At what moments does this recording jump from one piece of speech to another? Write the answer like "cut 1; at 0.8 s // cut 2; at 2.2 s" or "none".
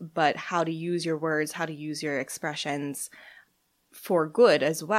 cut 1; at 3.4 s